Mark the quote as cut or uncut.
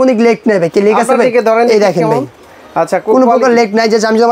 uncut